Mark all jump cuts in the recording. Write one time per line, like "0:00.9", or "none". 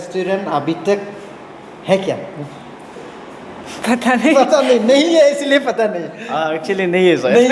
none

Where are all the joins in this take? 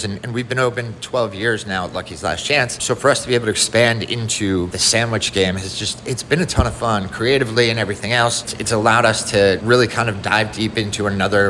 0:02.8
0:04.8
0:08.5
0:09.6

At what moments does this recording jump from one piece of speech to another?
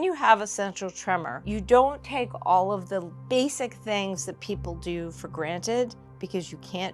0:03.2

